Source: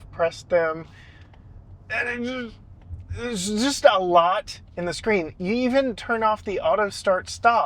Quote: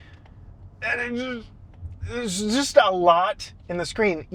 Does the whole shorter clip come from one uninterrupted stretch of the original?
yes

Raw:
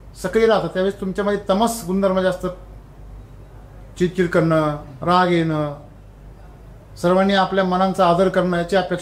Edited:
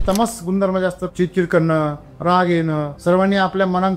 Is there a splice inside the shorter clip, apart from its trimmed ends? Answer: yes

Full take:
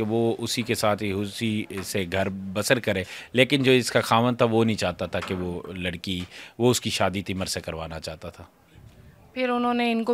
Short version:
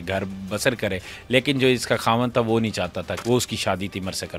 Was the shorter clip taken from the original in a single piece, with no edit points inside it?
no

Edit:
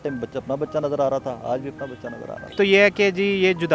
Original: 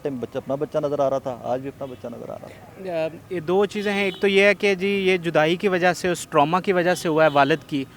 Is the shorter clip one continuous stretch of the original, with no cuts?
no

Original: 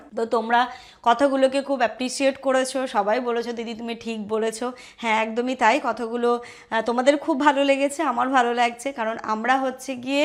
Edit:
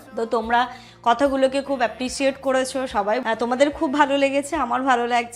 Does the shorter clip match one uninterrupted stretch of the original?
no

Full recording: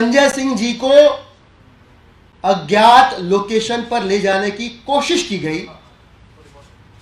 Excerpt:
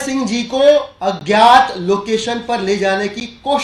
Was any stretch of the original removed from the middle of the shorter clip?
yes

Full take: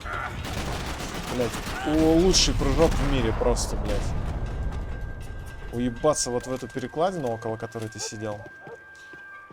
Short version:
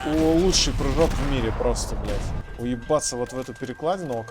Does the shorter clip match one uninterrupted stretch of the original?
no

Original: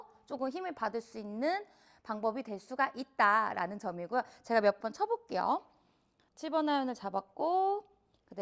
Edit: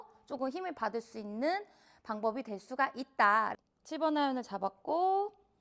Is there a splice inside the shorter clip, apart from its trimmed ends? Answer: yes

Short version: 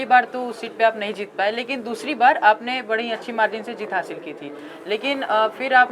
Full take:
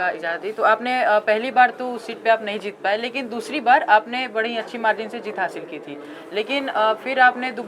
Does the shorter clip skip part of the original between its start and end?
no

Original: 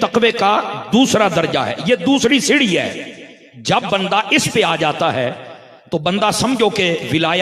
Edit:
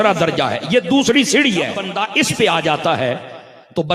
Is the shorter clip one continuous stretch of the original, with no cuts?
no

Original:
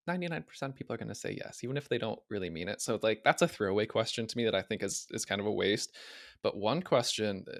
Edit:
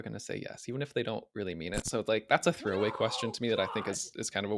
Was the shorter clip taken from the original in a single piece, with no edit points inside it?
yes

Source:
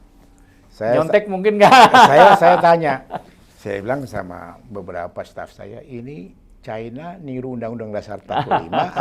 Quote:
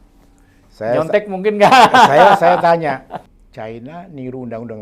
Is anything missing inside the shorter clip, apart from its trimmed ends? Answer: yes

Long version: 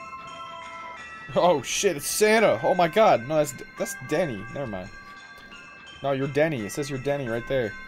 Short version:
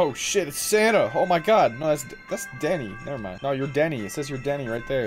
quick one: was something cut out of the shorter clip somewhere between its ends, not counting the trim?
yes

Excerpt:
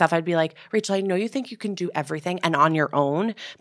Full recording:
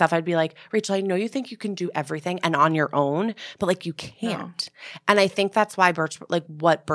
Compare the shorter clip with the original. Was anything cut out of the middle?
no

